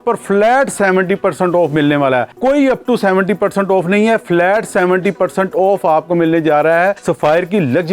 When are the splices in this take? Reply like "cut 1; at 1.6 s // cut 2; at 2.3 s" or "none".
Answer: cut 1; at 2.3 s // cut 2; at 7.0 s